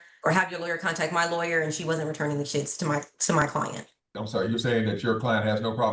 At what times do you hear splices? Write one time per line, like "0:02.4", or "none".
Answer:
0:04.1